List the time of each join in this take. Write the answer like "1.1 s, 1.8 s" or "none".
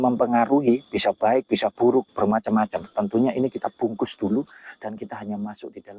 none